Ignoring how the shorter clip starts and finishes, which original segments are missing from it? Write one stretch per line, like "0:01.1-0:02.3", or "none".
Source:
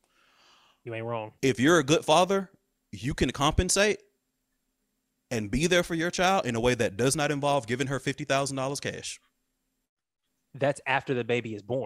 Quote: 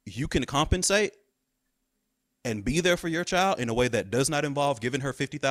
none